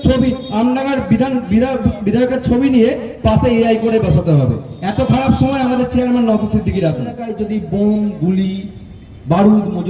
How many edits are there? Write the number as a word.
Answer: one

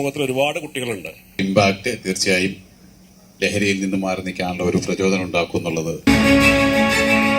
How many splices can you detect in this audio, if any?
two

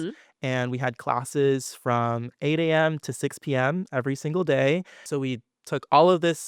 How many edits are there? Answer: one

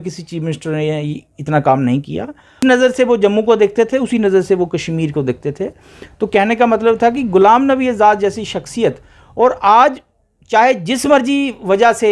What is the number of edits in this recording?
one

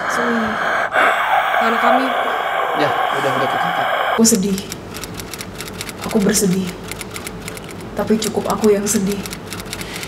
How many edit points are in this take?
one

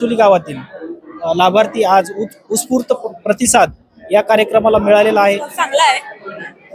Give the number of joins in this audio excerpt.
one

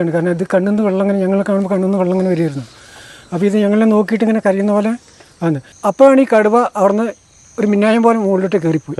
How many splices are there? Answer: one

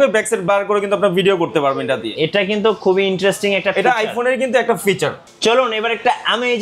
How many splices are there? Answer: one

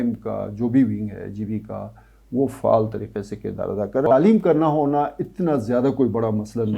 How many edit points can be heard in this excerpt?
one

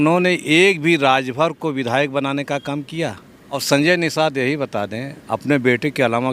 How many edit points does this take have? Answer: one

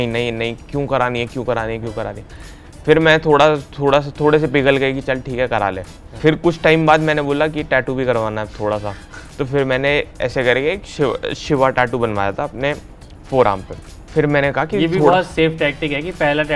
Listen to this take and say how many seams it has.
zero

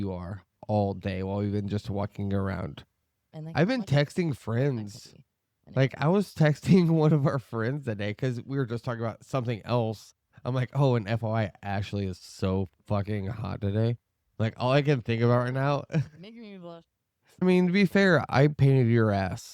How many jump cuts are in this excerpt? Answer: one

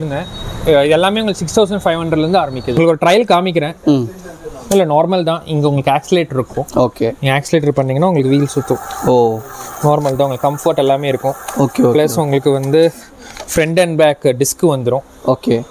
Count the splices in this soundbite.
one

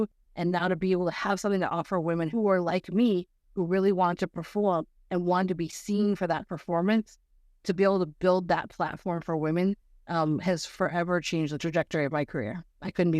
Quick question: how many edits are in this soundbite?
two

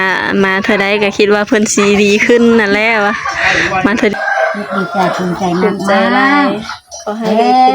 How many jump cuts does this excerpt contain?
one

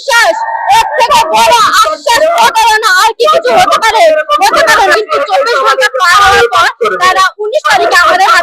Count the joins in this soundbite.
one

